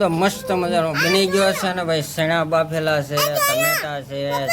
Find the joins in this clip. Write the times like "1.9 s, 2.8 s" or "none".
none

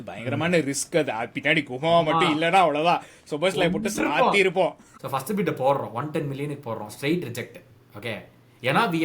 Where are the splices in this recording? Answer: 4.8 s

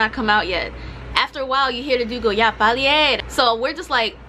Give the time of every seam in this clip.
3.2 s

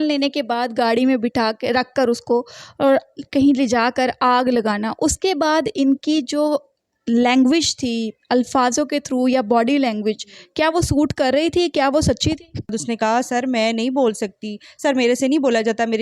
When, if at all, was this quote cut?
12.8 s

